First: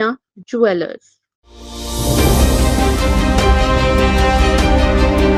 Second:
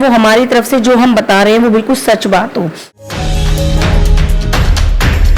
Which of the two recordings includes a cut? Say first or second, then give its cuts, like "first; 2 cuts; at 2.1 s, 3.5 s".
second; 1 cut; at 3.0 s